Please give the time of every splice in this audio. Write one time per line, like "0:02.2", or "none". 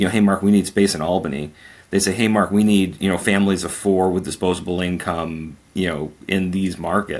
none